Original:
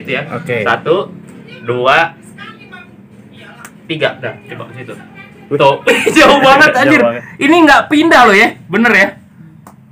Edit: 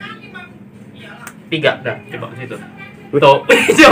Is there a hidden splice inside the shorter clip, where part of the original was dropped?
no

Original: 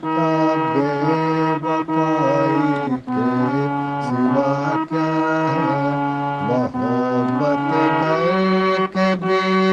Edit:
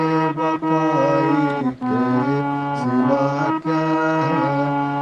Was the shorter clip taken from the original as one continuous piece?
yes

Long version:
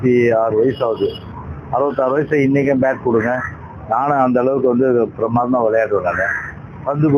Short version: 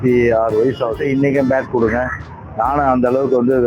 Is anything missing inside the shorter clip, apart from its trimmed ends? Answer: yes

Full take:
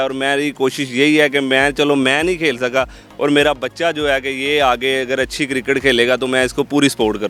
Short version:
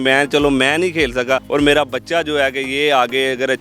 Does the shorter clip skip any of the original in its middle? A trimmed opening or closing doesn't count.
yes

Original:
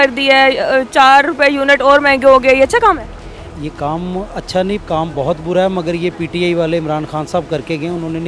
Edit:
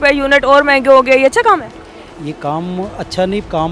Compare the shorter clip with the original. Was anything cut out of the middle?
no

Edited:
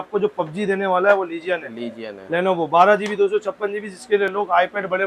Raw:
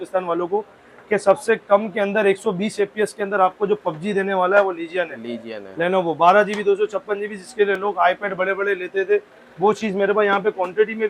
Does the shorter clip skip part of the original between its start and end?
no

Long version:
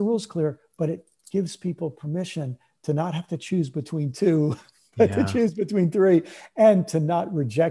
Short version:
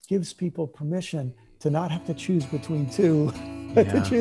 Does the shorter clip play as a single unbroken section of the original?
yes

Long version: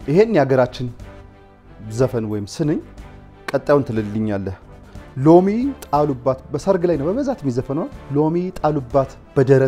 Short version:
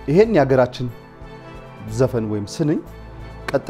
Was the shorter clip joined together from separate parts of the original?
no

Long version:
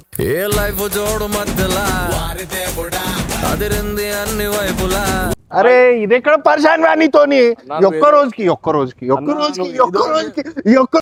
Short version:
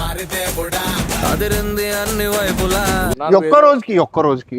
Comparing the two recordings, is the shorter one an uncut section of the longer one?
no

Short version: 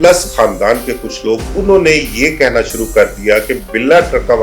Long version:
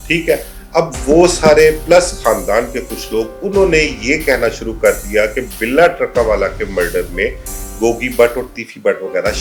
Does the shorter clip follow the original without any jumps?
yes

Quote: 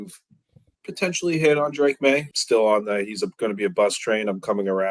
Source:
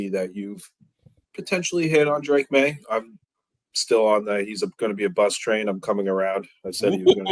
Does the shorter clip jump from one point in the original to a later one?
yes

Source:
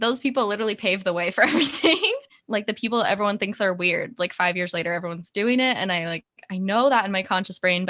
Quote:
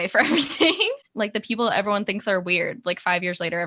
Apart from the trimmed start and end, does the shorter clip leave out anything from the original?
yes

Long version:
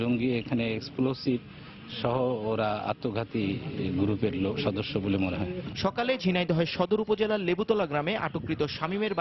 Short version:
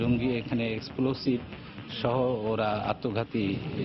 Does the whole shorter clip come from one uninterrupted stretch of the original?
yes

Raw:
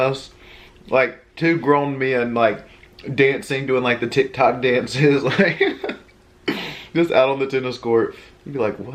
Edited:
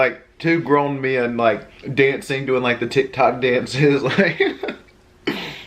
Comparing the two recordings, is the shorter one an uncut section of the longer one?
no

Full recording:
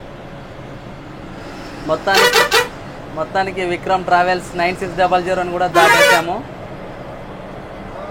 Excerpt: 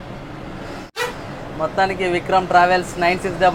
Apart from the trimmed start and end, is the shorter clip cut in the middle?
yes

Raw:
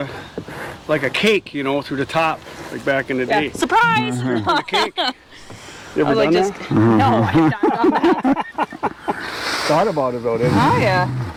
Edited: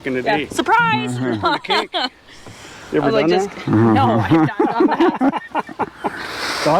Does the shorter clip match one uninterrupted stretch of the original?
yes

